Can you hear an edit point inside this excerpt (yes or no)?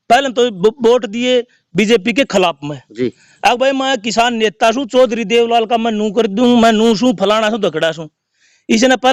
no